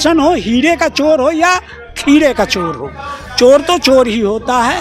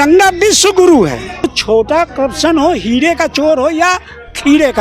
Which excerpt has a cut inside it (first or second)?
second